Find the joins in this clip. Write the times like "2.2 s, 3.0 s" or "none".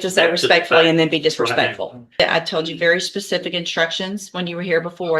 2.2 s